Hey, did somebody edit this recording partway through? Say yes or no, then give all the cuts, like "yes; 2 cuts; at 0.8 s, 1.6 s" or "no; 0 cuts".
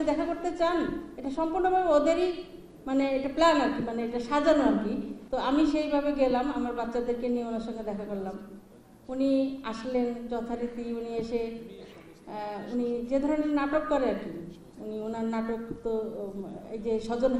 yes; 1 cut; at 5.1 s